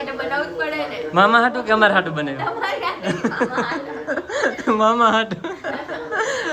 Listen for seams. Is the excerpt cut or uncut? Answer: uncut